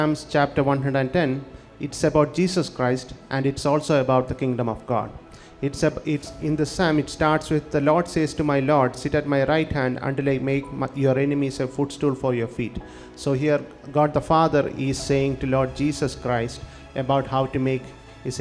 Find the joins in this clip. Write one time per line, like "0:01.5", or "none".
none